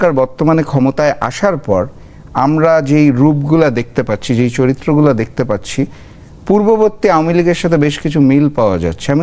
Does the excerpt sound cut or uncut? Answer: uncut